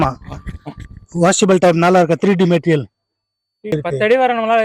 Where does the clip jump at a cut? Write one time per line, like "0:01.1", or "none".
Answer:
0:03.7